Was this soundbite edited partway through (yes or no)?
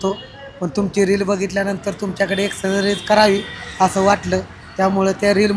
no